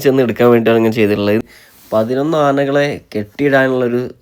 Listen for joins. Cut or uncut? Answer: cut